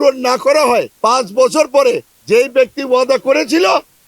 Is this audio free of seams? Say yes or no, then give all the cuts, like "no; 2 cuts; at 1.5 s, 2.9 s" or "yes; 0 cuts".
no; 2 cuts; at 0.9 s, 2.1 s